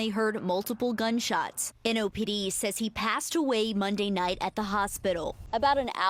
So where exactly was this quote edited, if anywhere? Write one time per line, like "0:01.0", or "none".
none